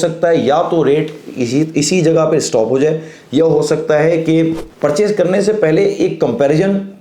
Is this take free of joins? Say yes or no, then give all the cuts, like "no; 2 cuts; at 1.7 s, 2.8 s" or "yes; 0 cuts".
no; 1 cut; at 4.6 s